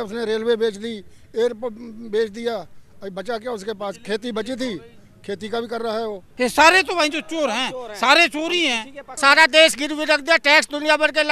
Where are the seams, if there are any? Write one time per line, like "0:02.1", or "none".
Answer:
0:06.3
0:09.0